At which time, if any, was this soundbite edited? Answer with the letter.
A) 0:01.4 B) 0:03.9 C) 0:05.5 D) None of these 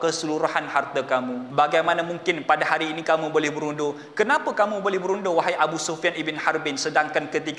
A